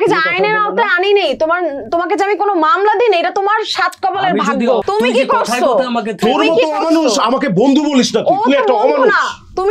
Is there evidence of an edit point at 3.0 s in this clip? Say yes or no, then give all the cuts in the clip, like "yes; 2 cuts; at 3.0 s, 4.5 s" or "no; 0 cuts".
no; 1 cut; at 4.8 s